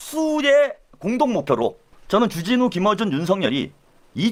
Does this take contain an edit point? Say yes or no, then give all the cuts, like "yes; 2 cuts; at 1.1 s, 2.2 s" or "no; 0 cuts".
no; 0 cuts